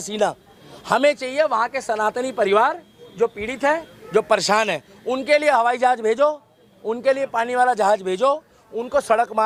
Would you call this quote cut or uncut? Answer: uncut